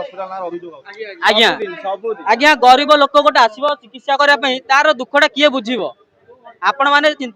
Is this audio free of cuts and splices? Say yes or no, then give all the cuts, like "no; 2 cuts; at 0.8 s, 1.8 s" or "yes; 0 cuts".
yes; 0 cuts